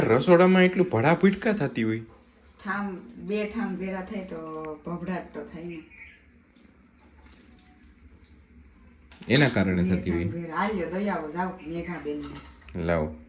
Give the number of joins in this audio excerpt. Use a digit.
0